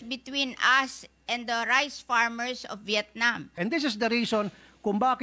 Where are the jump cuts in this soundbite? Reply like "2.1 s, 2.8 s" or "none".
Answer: 3.5 s